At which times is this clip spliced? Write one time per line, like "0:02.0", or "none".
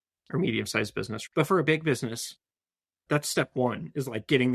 0:01.2